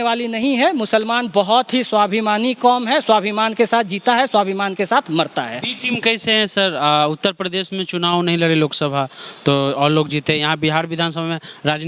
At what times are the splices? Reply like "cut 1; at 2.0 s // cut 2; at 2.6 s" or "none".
none